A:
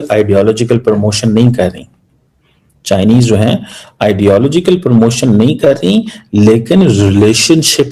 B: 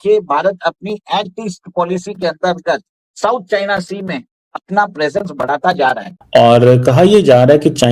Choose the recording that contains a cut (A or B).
B